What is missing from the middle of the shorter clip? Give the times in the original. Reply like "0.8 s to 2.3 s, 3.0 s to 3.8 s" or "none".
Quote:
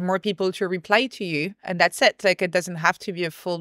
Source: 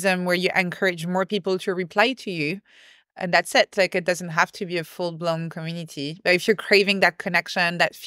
2.7 s to 3.1 s